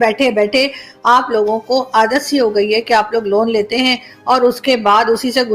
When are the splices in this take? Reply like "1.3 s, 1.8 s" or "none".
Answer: none